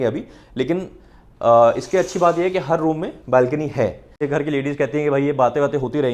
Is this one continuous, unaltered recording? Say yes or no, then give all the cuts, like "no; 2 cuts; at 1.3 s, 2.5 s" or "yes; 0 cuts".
no; 1 cut; at 4.2 s